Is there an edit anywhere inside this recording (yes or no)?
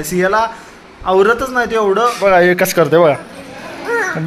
yes